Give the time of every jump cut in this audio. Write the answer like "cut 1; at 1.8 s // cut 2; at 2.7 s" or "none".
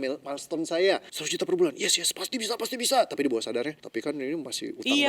cut 1; at 1.2 s // cut 2; at 3.8 s